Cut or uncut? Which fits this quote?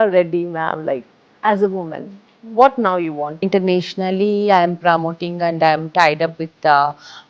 cut